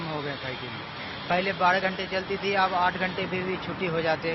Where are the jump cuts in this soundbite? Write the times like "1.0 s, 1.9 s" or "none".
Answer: 1.8 s